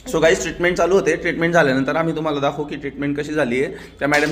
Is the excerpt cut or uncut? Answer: uncut